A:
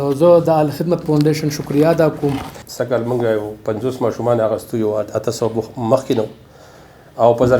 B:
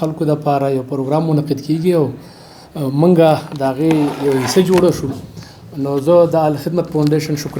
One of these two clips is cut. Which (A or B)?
A